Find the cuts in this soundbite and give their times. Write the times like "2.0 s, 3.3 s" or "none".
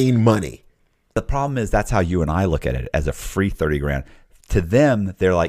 1.1 s

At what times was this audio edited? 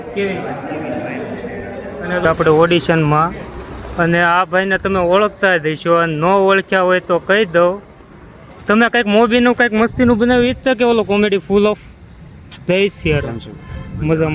2.3 s

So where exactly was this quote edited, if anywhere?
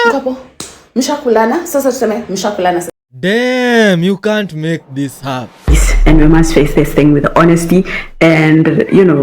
5.8 s

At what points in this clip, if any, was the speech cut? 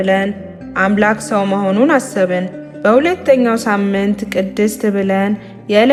none

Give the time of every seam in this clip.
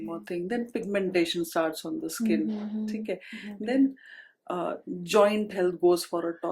none

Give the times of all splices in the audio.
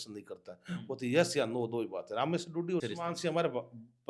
2.8 s

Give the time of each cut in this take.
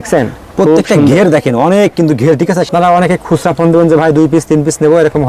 2.7 s

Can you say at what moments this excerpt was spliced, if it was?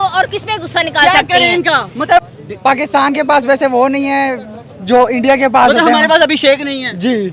2.3 s

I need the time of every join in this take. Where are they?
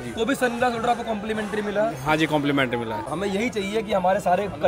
3.0 s

